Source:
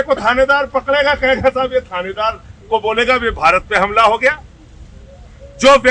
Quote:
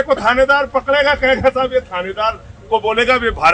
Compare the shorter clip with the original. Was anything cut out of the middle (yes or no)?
no